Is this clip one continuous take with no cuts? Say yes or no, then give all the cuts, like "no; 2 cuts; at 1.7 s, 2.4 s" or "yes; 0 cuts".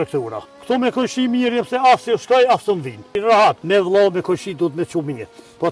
yes; 0 cuts